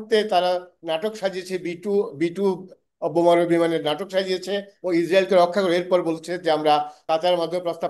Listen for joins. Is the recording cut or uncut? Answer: cut